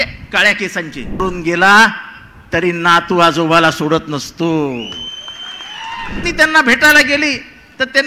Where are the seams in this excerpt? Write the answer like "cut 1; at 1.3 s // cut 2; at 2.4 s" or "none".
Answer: cut 1; at 1.2 s // cut 2; at 6.2 s

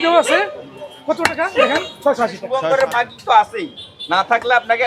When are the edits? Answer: cut 1; at 2.4 s

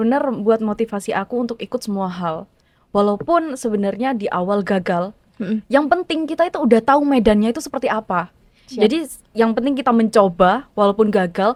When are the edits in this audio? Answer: none

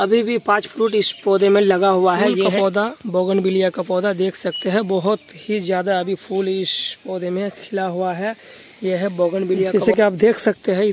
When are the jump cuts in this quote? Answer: cut 1; at 2.5 s // cut 2; at 9.7 s

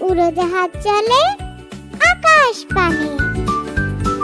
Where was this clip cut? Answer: cut 1; at 3.1 s

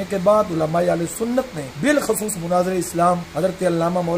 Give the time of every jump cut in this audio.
cut 1; at 1.6 s // cut 2; at 3.3 s

